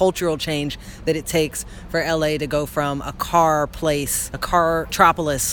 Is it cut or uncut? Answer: cut